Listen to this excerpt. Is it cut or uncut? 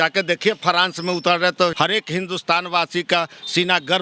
cut